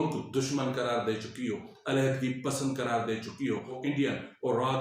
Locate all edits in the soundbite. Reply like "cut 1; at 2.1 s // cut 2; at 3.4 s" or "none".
cut 1; at 1.7 s // cut 2; at 3.8 s